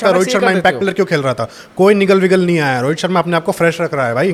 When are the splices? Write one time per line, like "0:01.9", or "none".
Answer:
none